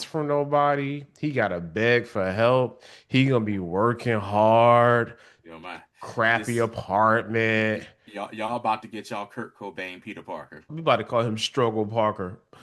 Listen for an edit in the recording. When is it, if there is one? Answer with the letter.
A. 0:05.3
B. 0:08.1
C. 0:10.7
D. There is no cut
C